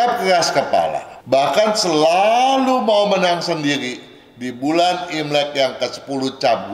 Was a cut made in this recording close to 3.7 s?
no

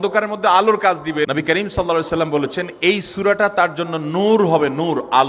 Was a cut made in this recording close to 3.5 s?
no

